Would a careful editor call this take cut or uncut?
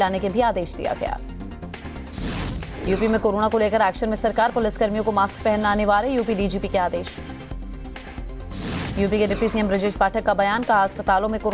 cut